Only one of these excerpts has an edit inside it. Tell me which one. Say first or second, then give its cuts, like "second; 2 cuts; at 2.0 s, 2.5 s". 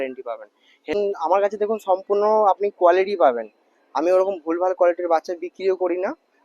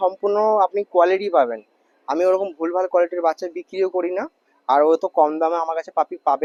first; 1 cut; at 0.9 s